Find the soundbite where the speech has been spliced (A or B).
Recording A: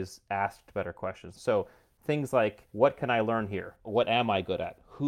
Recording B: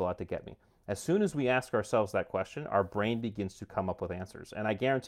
A